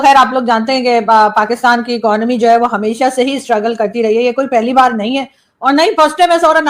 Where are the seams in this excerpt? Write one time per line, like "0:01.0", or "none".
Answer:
none